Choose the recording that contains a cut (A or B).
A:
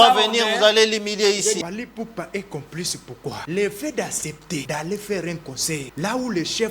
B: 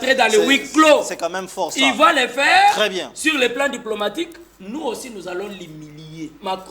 A